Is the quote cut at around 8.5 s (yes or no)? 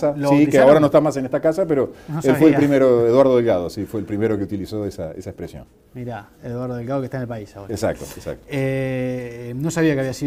no